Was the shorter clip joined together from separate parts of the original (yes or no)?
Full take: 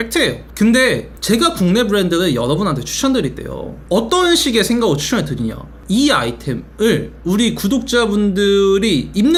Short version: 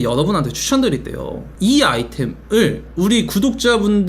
yes